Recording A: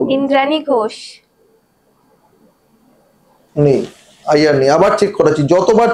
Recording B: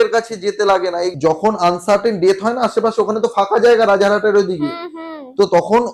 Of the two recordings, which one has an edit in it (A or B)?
B